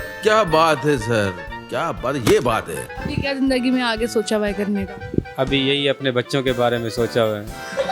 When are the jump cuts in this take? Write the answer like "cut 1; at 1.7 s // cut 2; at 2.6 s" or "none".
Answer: cut 1; at 2.8 s